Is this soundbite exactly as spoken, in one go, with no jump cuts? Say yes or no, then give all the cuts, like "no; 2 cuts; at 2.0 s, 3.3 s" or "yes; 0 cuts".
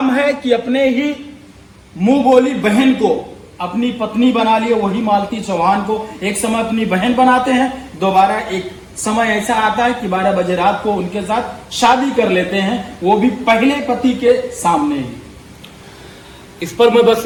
yes; 0 cuts